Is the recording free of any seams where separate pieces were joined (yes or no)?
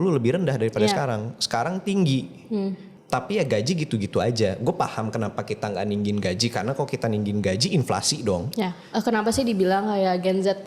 no